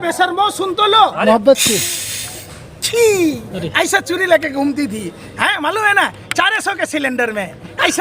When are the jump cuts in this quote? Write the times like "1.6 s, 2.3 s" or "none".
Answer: 1.2 s